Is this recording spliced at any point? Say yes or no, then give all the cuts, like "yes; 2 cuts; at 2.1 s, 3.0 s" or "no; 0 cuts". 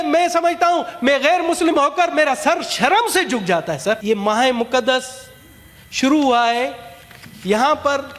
yes; 1 cut; at 4.0 s